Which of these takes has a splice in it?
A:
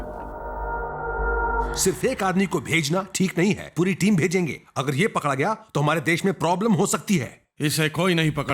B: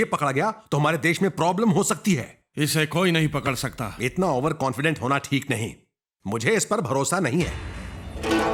A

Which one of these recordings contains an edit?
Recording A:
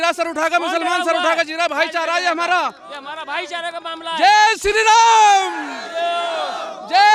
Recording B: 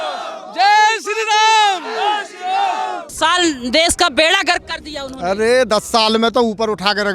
B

